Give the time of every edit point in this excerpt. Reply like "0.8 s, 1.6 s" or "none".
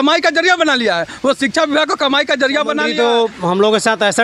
2.9 s